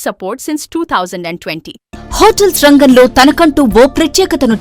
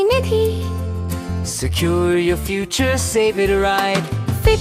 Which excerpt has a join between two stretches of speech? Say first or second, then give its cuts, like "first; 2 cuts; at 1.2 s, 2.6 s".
first; 1 cut; at 1.8 s